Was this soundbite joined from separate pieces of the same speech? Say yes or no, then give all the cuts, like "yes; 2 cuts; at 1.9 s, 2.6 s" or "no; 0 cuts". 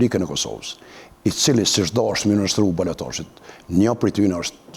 no; 0 cuts